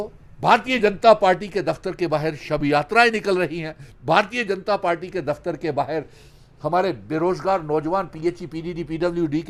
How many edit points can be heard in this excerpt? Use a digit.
0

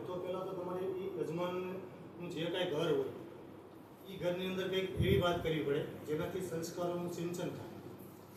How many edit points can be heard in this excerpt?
0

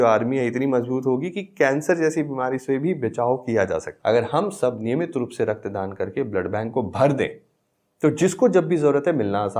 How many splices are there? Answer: 1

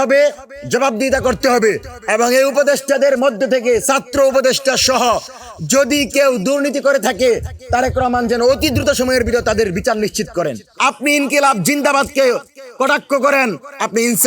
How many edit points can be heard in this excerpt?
1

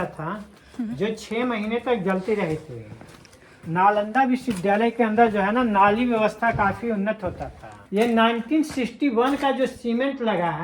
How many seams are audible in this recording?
1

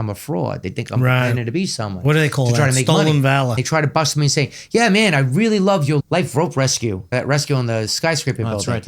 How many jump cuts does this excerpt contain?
3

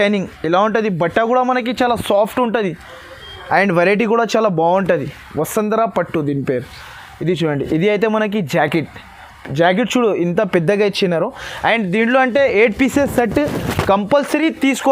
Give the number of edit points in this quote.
0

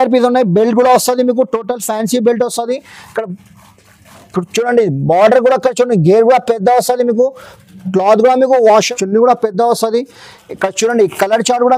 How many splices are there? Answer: 1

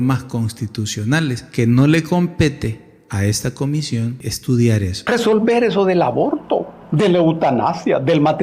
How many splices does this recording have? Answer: 3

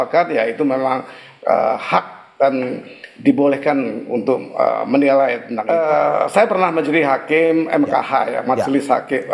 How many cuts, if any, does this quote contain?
1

